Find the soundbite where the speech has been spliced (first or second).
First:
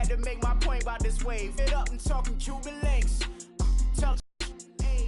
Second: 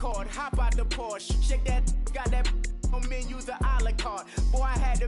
first